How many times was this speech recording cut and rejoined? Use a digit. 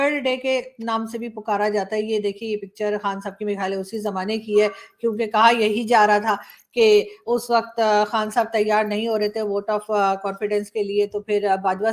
0